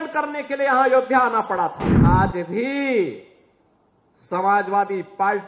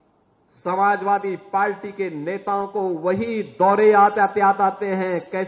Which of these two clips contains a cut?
first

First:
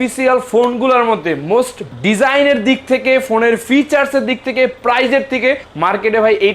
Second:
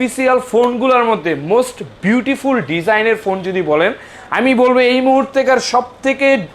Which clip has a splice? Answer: first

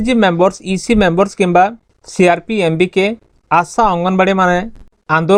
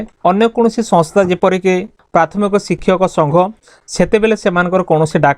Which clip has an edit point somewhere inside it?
second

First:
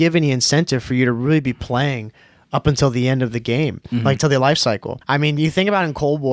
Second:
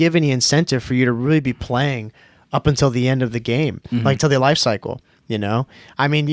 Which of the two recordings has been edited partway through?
first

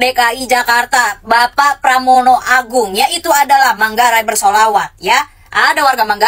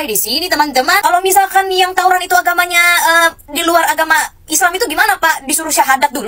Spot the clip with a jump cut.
second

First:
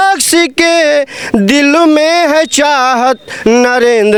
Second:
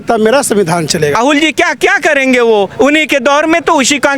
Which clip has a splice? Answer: second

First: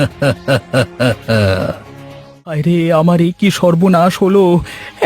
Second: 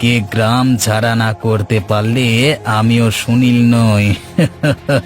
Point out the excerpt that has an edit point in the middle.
first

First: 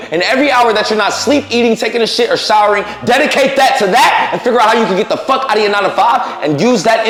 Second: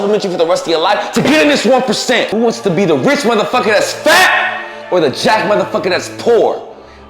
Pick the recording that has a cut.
second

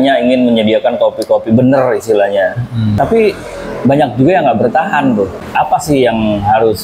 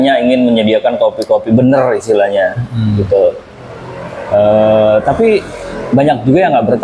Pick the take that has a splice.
first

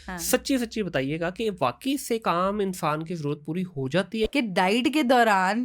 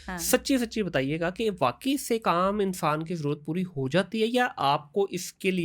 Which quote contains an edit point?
first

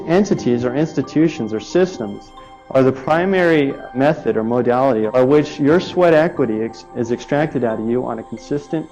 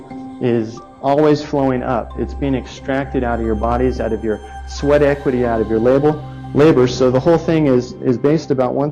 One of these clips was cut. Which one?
first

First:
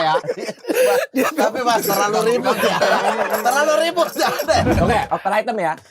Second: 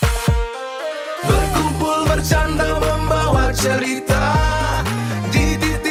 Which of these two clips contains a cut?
first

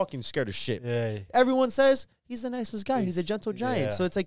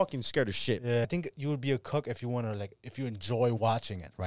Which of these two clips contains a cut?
second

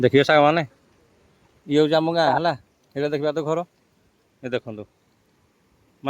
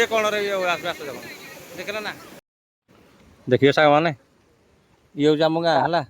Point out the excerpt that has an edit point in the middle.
second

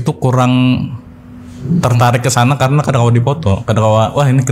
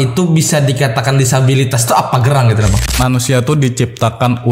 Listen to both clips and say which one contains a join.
second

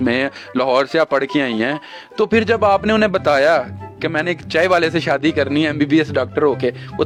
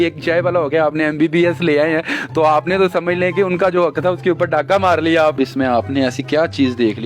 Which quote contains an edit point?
second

